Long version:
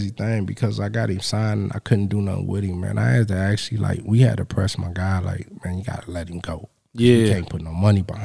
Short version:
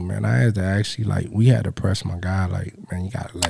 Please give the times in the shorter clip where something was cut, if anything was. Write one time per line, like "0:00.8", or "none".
none